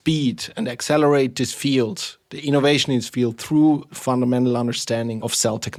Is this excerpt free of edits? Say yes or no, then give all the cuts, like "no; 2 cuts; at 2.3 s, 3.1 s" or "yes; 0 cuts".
yes; 0 cuts